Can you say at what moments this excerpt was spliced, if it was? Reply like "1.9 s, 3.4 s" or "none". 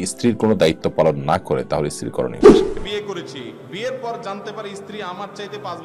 2.3 s